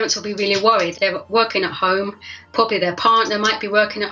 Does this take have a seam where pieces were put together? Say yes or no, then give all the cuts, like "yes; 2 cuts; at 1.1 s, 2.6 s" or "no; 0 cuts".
yes; 2 cuts; at 0.9 s, 2.4 s